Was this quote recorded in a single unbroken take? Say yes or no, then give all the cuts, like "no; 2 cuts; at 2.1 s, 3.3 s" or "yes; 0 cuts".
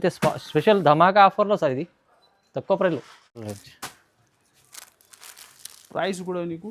no; 1 cut; at 3.4 s